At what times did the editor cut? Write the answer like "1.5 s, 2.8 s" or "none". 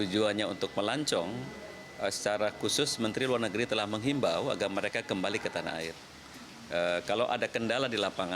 none